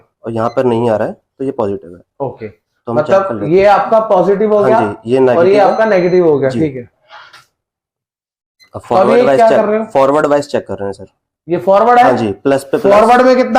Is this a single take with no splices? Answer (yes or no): yes